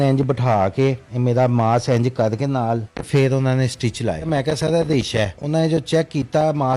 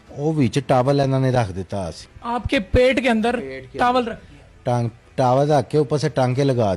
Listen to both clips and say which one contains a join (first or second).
first